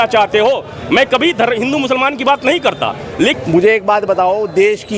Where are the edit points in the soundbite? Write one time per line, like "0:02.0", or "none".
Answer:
0:03.3